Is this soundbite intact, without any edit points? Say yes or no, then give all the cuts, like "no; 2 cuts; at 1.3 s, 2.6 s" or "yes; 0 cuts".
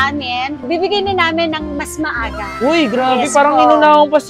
yes; 0 cuts